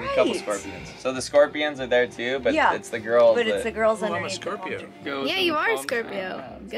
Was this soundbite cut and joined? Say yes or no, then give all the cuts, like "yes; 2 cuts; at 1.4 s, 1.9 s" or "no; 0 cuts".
no; 0 cuts